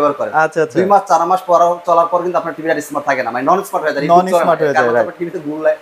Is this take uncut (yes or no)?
yes